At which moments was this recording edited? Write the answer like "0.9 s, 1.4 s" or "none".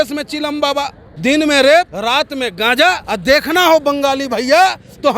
1.0 s, 1.9 s, 3.0 s